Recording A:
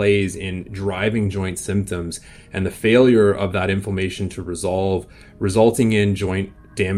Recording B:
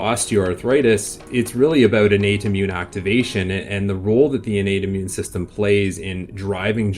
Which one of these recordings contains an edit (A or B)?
B